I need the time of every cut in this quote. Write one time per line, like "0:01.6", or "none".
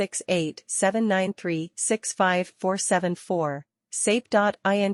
none